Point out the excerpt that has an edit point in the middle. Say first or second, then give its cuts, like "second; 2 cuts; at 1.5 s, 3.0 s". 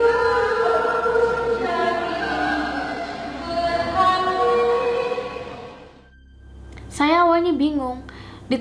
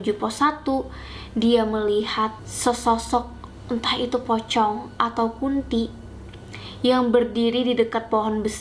second; 1 cut; at 2.5 s